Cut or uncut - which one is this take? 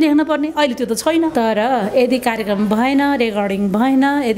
cut